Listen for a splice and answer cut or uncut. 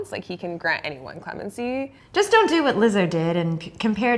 cut